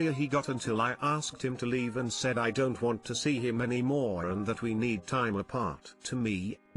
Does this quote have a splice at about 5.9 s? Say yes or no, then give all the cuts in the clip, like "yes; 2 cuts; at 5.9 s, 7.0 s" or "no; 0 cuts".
yes; 1 cut; at 5.9 s